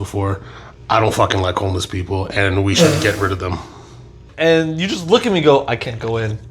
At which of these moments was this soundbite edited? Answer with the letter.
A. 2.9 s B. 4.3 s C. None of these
B